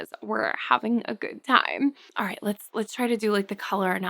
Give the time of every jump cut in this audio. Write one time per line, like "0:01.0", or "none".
0:02.1

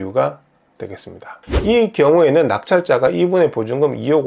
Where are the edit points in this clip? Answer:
0:01.4

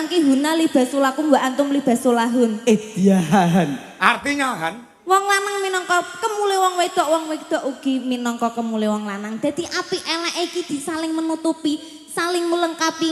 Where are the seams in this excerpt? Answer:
none

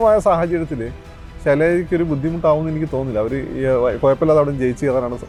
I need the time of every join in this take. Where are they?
none

